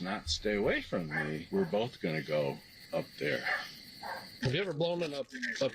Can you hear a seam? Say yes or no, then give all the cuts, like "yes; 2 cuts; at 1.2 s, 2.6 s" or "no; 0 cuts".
yes; 2 cuts; at 1.4 s, 3.9 s